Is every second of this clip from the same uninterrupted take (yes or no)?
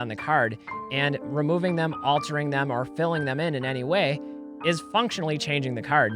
no